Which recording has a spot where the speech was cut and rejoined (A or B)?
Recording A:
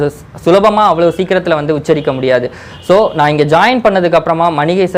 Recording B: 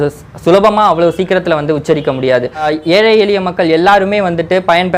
B